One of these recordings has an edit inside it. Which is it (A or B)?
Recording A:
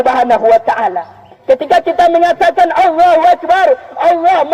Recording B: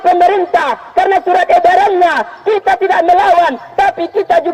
A